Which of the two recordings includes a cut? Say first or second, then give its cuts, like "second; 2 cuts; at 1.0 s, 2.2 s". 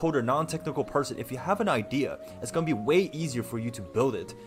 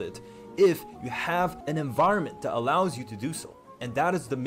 second; 1 cut; at 1.6 s